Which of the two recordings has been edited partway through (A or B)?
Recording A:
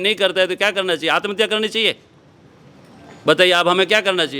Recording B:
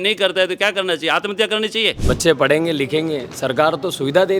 B